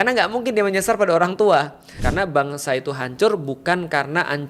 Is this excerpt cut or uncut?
cut